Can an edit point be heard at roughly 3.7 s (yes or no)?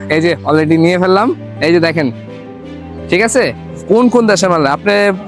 yes